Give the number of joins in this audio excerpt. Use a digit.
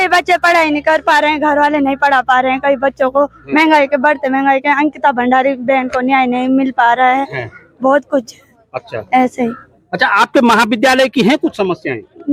0